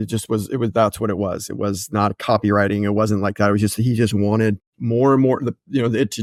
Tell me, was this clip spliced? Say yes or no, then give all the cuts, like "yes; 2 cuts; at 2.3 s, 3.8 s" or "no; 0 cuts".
no; 0 cuts